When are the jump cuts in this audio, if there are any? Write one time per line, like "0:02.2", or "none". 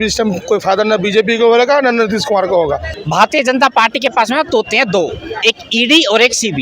0:02.9